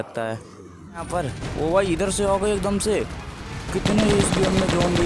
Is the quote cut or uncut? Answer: cut